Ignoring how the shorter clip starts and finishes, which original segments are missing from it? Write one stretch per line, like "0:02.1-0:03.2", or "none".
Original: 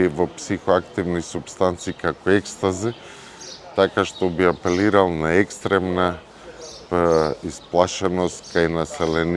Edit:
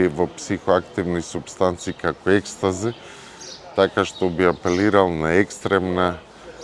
none